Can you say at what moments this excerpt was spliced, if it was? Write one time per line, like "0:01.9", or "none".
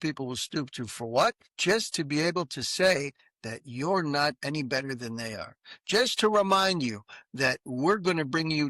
0:01.5